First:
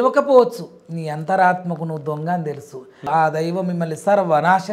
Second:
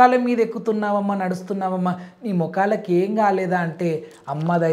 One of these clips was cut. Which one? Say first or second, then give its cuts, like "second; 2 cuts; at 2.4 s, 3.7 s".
first; 1 cut; at 3.0 s